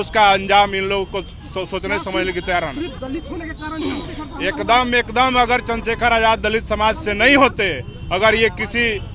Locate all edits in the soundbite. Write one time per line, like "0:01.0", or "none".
none